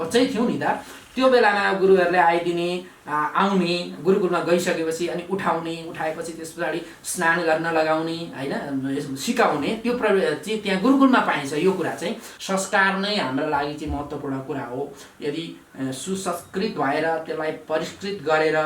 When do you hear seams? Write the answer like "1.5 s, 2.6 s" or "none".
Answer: 12.3 s